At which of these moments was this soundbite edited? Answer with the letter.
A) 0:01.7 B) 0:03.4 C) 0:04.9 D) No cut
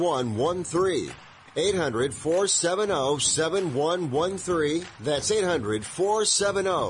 C